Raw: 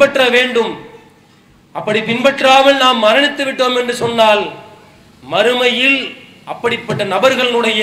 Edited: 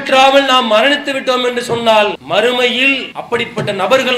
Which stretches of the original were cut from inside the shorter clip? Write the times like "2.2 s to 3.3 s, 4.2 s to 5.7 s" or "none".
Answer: 4.5 s to 5.2 s, 6.1 s to 6.4 s